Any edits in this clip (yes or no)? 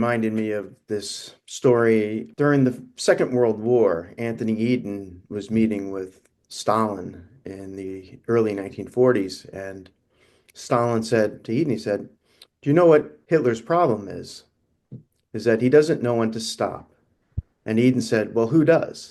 yes